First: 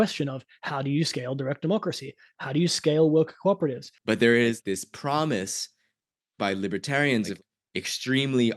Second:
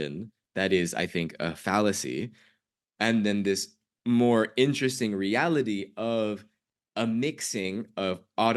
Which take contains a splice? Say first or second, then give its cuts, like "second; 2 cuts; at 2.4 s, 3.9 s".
first; 1 cut; at 3.9 s